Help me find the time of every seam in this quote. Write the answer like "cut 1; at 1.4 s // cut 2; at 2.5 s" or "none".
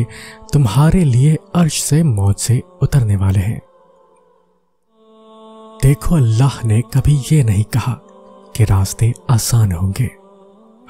cut 1; at 3.6 s // cut 2; at 5.2 s